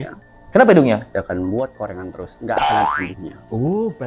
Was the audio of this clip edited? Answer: no; 0 cuts

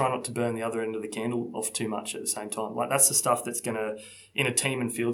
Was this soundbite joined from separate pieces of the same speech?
no; 0 cuts

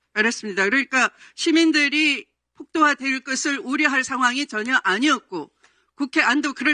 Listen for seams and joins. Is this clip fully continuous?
yes; 0 cuts

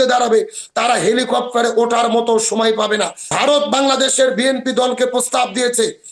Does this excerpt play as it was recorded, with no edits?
no; 1 cut; at 3.2 s

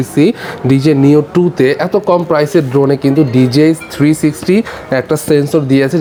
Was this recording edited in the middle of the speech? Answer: no; 0 cuts

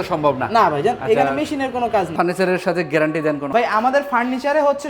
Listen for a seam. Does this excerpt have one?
yes; 2 cuts; at 2.1 s, 3.5 s

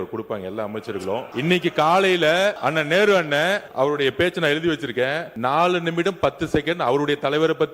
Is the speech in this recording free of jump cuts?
no; 4 cuts; at 1.3 s, 2.6 s, 3.7 s, 5.3 s

